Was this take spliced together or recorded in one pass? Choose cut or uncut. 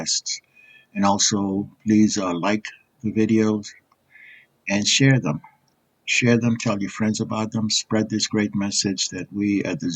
uncut